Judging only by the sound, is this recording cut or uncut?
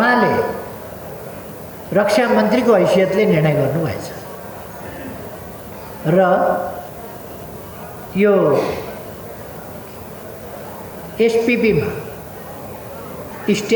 uncut